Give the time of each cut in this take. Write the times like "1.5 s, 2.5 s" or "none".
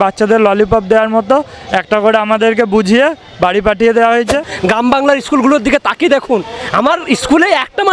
4.6 s